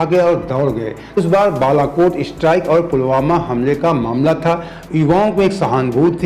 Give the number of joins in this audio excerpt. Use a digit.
1